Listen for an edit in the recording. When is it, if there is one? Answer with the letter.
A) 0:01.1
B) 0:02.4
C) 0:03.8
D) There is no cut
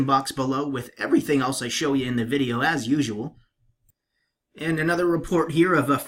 A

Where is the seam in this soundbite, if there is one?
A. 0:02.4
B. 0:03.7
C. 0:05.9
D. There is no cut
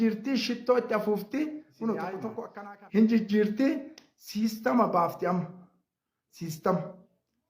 A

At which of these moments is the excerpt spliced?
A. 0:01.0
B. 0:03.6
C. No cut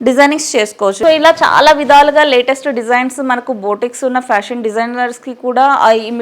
A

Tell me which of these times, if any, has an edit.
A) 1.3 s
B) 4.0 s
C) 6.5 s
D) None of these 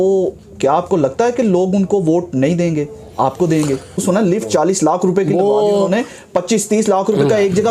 B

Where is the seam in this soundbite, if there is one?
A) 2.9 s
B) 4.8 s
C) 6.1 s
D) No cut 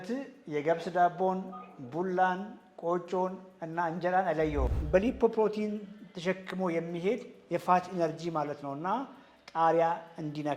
B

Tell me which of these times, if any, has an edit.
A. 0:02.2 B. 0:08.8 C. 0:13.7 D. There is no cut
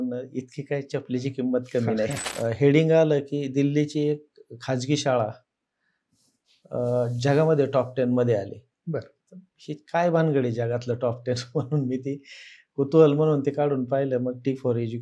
A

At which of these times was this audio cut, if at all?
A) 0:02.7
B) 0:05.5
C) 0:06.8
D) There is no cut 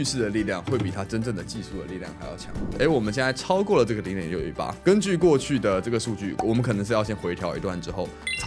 A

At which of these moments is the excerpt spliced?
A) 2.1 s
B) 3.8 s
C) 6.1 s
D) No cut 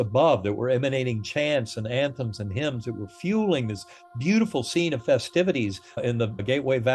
C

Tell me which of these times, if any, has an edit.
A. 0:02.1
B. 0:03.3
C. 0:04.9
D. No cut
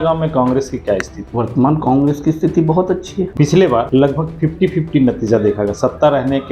B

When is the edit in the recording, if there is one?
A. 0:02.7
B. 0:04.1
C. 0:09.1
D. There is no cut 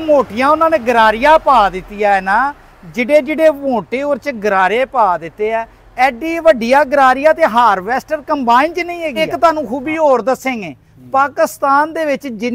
C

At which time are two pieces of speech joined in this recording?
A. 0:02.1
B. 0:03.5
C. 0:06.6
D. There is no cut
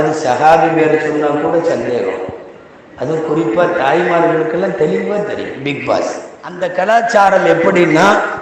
C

